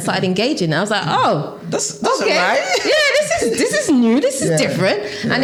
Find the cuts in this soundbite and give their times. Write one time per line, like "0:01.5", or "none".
none